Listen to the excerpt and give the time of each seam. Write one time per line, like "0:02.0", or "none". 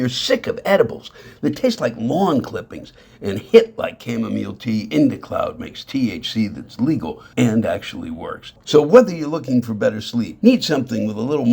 0:07.2
0:08.6
0:10.3